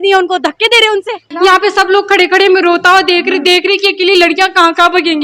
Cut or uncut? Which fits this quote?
cut